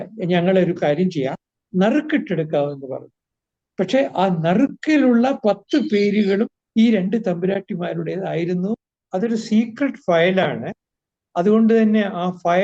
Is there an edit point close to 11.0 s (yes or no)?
no